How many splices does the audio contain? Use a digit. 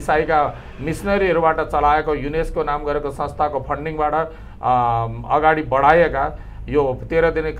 0